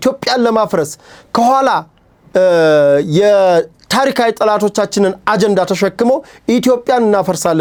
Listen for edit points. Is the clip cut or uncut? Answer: uncut